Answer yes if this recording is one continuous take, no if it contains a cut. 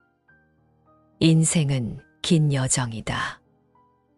no